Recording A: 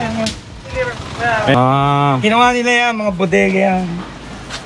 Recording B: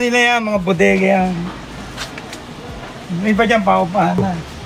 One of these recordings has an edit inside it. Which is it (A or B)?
A